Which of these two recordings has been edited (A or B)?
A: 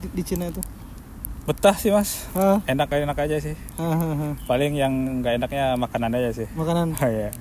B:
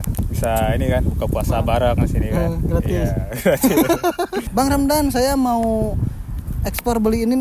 B